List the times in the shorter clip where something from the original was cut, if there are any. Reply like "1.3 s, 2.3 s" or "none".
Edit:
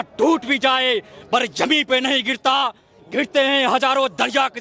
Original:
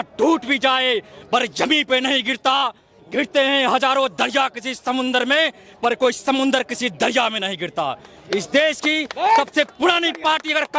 none